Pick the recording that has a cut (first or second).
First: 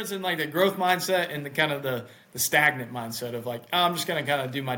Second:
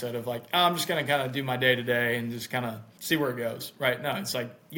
second